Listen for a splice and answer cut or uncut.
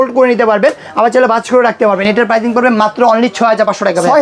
uncut